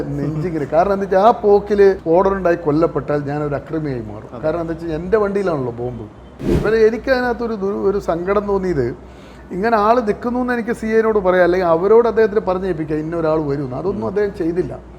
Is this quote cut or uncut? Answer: cut